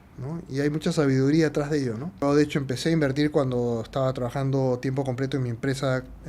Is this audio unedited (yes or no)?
no